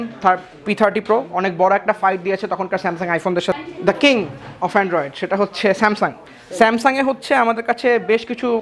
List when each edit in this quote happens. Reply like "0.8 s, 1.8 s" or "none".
3.5 s